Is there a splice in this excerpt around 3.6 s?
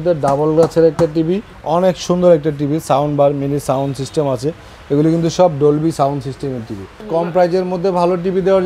no; 2 cuts; at 1.5 s, 7.0 s

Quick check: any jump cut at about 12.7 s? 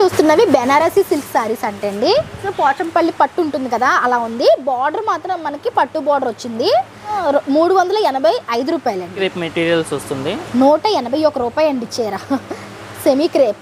no; 3 cuts; at 2.4 s, 7.1 s, 9.2 s

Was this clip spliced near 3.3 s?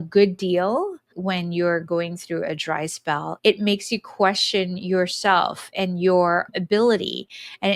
yes; 3 cuts; at 1.0 s, 3.3 s, 6.5 s

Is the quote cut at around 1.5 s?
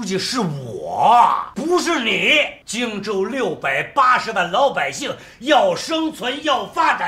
yes; 2 cuts; at 1.5 s, 2.6 s

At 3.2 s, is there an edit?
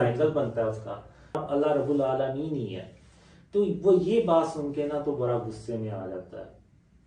no; 1 cut; at 1.4 s

